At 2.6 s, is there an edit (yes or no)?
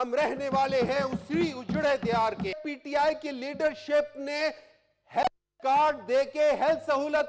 yes